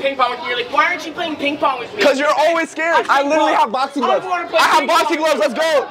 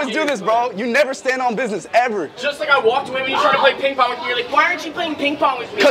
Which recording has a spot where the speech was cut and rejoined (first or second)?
first